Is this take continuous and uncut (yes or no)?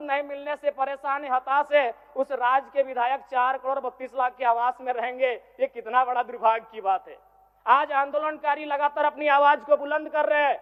yes